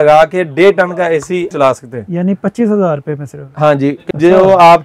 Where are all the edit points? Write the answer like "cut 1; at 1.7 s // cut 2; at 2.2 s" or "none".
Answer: cut 1; at 1.5 s // cut 2; at 4.0 s